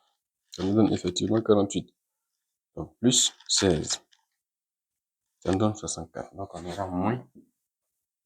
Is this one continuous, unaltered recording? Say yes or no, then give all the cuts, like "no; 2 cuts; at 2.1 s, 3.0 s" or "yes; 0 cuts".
yes; 0 cuts